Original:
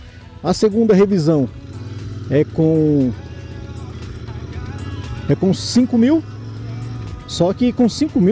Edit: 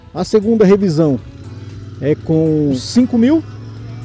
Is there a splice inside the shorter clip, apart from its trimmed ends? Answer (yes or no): yes